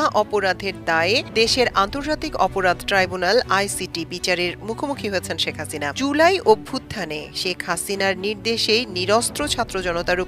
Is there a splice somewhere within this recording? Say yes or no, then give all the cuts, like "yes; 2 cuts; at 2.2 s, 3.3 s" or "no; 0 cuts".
yes; 1 cut; at 5.9 s